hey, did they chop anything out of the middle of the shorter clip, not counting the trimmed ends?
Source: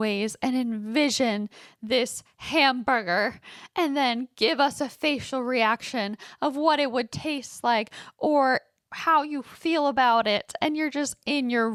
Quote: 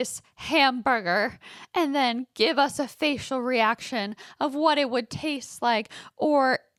no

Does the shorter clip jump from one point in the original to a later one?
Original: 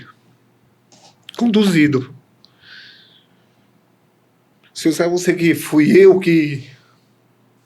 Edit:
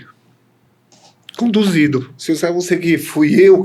yes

